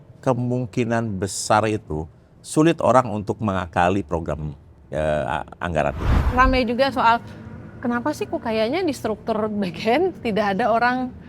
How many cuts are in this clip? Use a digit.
1